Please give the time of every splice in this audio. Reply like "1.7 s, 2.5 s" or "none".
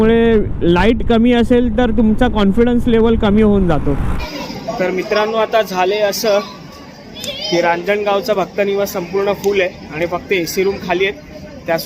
4.2 s